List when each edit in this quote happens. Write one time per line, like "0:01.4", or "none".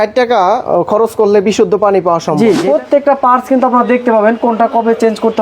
0:02.6